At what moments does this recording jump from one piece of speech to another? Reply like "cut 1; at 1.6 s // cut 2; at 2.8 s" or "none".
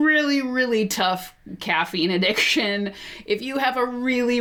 none